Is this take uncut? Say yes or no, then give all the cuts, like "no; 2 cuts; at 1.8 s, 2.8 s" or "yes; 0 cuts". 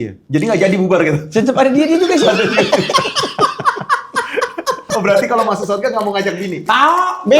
no; 1 cut; at 4.8 s